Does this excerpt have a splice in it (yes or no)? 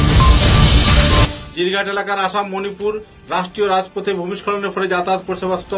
no